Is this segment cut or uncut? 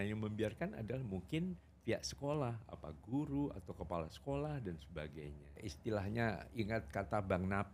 cut